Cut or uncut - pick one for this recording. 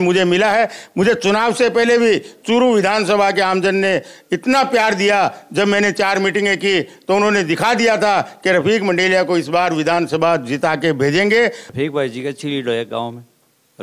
cut